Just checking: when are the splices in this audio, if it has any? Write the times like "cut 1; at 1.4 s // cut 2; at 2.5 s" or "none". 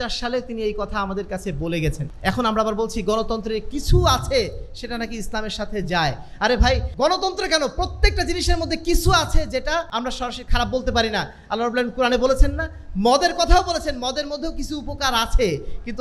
cut 1; at 2.1 s // cut 2; at 6.9 s // cut 3; at 9.9 s

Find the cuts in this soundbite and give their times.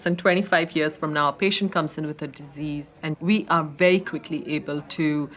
cut 1; at 3.0 s

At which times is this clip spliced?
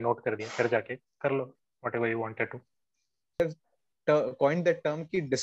cut 1; at 3.4 s

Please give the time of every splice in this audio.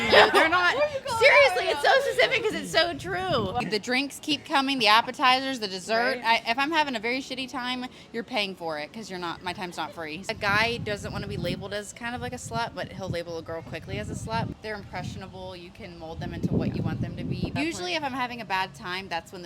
cut 1; at 3.6 s // cut 2; at 10.2 s // cut 3; at 14.5 s // cut 4; at 17.5 s

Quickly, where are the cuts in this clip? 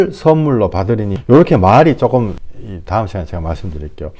none

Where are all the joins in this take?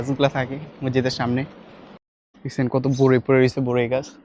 cut 1; at 2.0 s

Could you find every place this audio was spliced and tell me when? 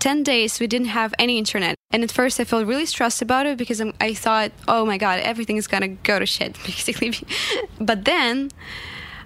cut 1; at 1.8 s // cut 2; at 6.0 s // cut 3; at 7.7 s

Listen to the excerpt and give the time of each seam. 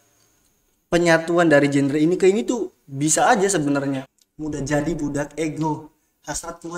cut 1; at 4.1 s

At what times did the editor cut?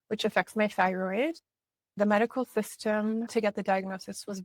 cut 1; at 1.9 s // cut 2; at 3.3 s

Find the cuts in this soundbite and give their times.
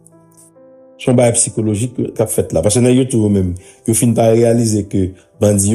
cut 1; at 1.0 s

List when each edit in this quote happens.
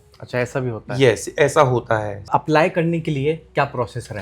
cut 1; at 2.3 s

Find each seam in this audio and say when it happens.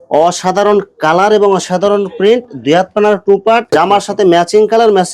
cut 1; at 3.7 s

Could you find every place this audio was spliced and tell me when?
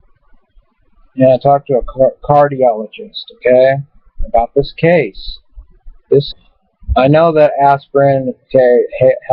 none

